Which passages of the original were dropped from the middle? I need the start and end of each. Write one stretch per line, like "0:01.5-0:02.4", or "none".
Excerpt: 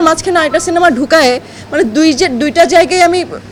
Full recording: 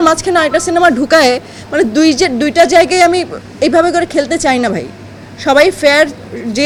none